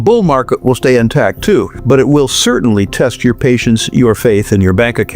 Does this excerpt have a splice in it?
yes; 1 cut; at 1.7 s

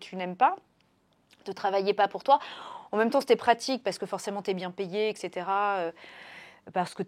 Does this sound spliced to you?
no; 0 cuts

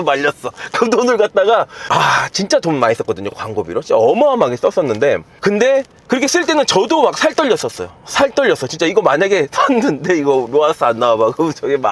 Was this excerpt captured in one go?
yes; 0 cuts

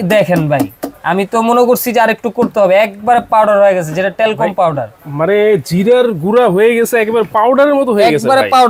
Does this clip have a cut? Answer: no; 0 cuts

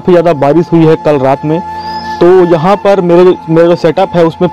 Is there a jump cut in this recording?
no; 0 cuts

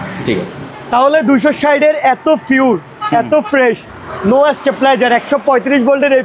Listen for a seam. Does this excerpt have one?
no; 0 cuts

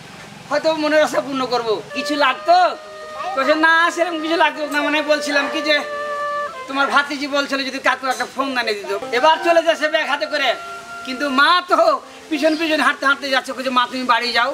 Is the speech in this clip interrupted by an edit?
yes; 2 cuts; at 1.9 s, 9.0 s

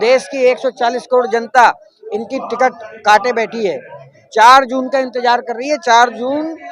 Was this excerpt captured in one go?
yes; 0 cuts

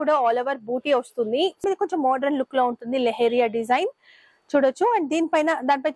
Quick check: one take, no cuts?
no; 1 cut; at 1.6 s

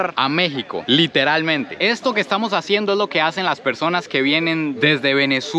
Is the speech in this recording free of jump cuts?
no; 1 cut; at 1.7 s

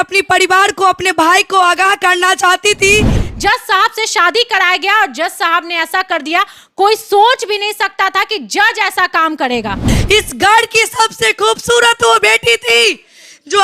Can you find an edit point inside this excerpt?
yes; 2 cuts; at 3.2 s, 9.9 s

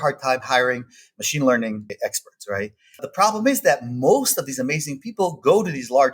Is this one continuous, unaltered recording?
no; 2 cuts; at 1.9 s, 3.1 s

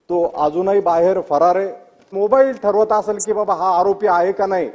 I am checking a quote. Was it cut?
yes; 1 cut; at 2.1 s

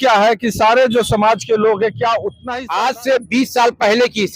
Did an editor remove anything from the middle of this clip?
yes; 1 cut; at 2.4 s

